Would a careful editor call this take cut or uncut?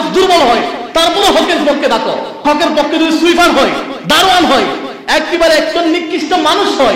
cut